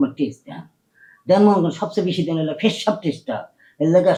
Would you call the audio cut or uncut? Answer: uncut